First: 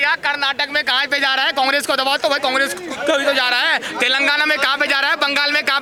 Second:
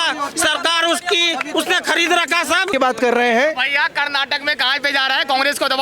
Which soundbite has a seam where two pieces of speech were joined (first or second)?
second